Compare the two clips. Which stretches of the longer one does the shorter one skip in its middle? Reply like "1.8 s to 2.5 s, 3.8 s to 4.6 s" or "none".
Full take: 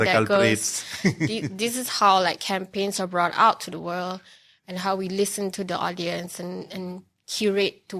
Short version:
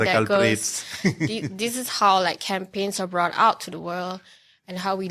none